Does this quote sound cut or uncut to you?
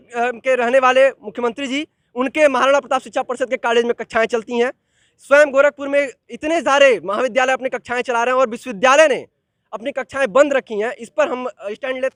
uncut